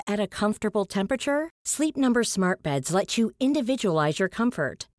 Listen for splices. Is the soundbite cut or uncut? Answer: uncut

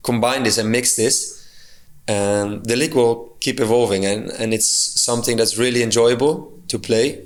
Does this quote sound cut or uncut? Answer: uncut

